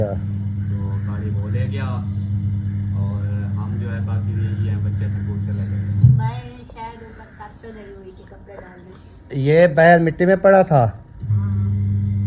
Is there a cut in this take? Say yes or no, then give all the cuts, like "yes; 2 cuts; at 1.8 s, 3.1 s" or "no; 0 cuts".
no; 0 cuts